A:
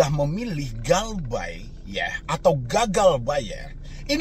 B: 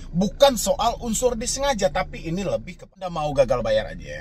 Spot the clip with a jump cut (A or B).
B